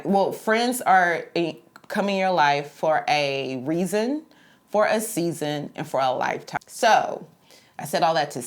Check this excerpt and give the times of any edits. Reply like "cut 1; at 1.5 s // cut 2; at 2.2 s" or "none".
cut 1; at 6.6 s

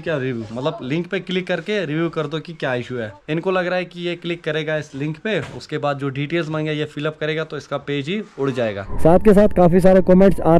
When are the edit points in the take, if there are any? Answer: cut 1; at 3.2 s // cut 2; at 8.8 s

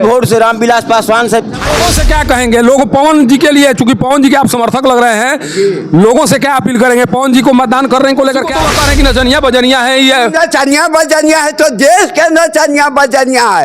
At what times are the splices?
cut 1; at 1.8 s // cut 2; at 8.6 s

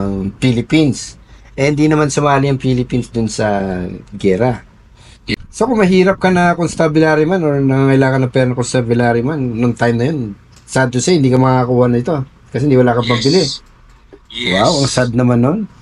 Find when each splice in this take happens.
cut 1; at 5.4 s

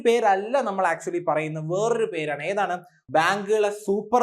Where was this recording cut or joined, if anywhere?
cut 1; at 3.0 s

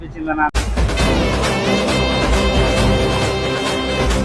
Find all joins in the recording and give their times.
none

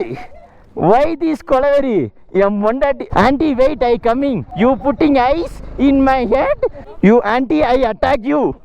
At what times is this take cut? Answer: cut 1; at 3.0 s // cut 2; at 4.4 s // cut 3; at 6.8 s

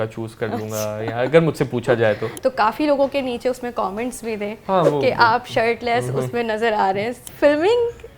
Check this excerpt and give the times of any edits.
cut 1; at 2.3 s // cut 2; at 7.1 s

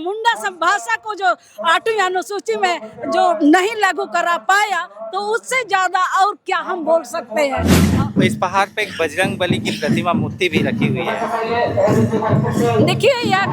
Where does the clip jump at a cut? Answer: cut 1; at 7.8 s

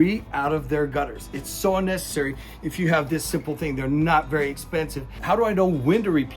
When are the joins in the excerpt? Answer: cut 1; at 5.1 s

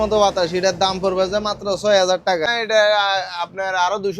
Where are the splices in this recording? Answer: cut 1; at 2.5 s

